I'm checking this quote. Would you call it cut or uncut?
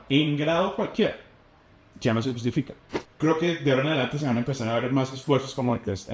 cut